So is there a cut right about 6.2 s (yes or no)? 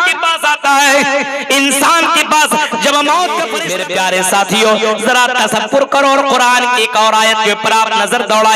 no